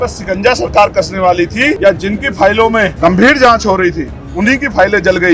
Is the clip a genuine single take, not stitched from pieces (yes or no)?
no